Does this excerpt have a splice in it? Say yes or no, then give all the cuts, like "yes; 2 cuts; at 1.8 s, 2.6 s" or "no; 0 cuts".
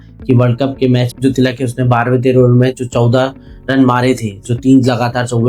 yes; 1 cut; at 1.1 s